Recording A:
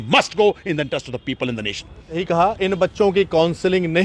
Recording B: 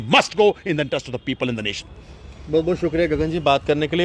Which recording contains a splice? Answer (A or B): A